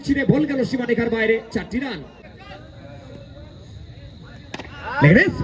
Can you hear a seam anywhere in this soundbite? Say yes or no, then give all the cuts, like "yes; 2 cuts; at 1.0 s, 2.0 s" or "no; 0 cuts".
yes; 1 cut; at 2.0 s